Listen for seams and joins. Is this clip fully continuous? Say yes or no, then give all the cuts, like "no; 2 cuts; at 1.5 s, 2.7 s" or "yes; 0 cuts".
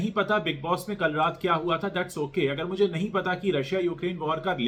yes; 0 cuts